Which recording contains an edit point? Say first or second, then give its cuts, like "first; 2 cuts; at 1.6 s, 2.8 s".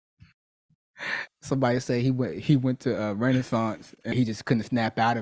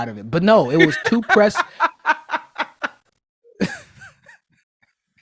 first; 1 cut; at 4.1 s